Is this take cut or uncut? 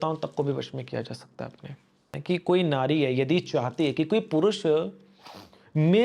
cut